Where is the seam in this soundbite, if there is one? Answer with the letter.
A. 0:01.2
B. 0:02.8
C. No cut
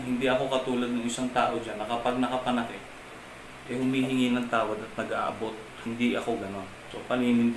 C